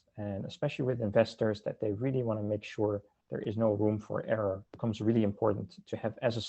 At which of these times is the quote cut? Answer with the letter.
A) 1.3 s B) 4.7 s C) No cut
B